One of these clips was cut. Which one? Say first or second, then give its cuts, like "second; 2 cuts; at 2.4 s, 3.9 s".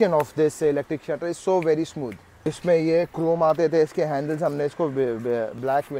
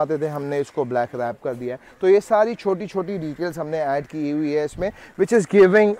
first; 1 cut; at 2.6 s